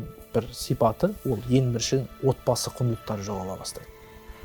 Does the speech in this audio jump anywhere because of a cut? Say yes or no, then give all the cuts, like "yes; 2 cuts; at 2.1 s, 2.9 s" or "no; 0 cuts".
no; 0 cuts